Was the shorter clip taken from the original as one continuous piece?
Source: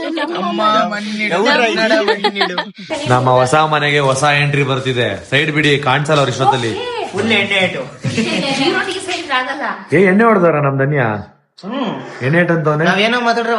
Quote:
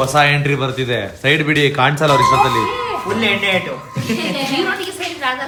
yes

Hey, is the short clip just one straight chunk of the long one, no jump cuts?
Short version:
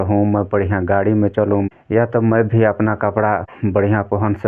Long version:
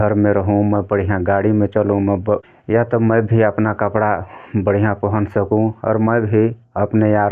no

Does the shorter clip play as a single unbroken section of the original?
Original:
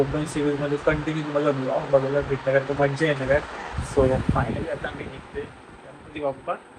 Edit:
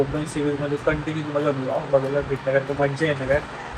yes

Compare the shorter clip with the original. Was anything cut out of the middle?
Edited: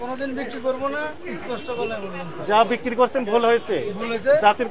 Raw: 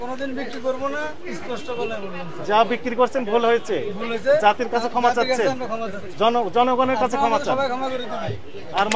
no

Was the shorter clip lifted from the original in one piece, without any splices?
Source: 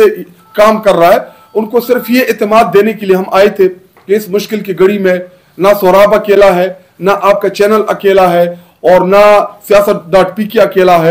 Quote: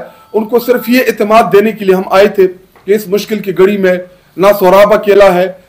yes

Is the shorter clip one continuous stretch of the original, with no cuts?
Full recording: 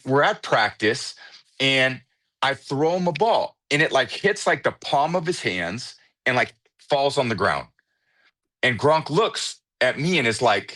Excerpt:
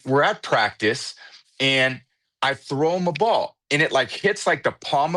yes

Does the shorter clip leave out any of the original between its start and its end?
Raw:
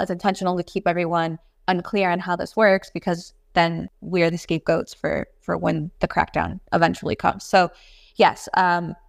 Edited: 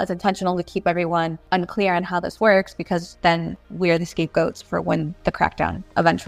yes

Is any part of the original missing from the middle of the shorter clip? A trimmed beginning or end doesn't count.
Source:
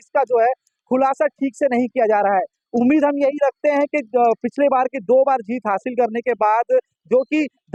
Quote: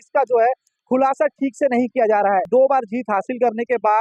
yes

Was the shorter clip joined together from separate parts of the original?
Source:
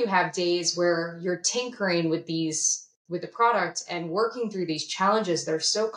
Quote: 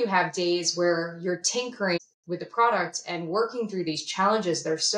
yes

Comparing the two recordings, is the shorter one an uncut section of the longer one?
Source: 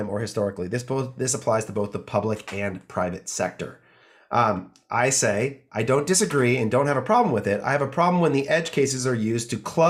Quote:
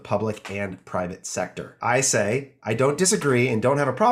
no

